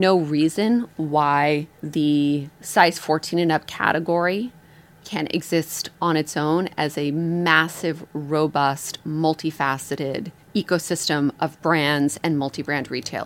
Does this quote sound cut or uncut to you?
cut